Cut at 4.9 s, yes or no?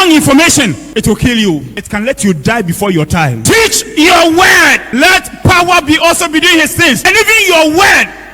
yes